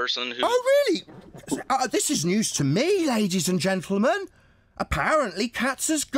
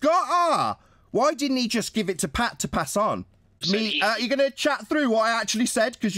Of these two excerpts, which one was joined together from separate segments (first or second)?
second